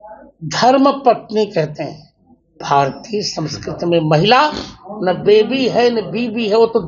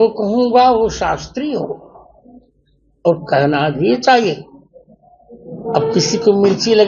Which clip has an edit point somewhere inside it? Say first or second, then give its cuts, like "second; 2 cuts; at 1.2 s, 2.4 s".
first; 1 cut; at 2.6 s